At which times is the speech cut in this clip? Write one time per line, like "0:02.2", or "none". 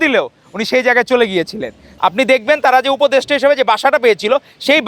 0:01.8